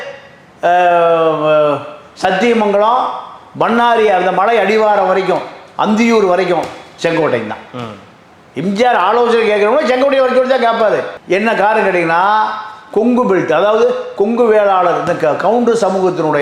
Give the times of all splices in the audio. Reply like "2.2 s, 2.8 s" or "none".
none